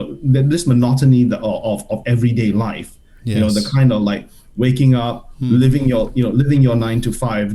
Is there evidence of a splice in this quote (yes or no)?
no